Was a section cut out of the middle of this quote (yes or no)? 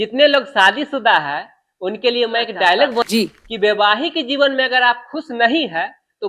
yes